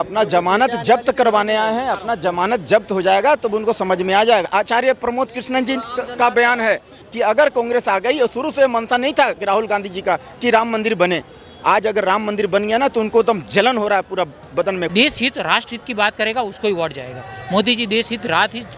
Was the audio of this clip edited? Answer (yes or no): yes